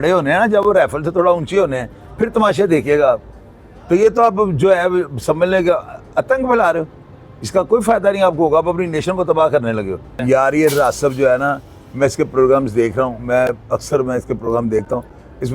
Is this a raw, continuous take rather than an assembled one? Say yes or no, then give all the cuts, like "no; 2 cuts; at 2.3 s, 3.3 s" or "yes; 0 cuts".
yes; 0 cuts